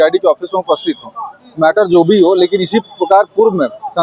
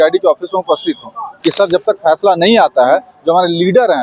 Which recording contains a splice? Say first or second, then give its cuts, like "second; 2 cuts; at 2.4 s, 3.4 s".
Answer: second; 1 cut; at 1.3 s